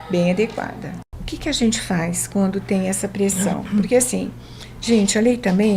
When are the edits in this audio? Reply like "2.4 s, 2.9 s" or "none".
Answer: 1.1 s